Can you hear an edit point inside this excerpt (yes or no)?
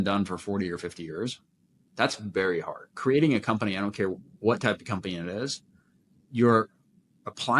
yes